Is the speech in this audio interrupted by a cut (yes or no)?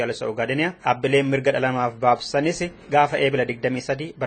yes